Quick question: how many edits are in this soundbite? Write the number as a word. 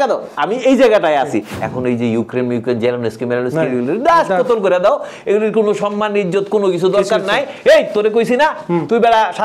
one